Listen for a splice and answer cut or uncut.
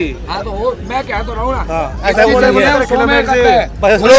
uncut